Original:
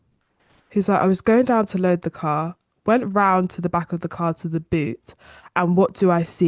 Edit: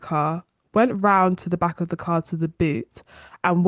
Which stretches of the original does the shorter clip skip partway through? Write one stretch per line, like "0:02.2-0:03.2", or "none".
none